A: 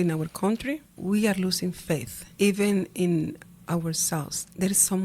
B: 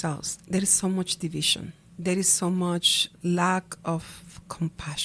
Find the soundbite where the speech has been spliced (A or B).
A